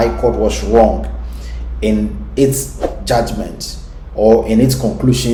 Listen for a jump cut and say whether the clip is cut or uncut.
uncut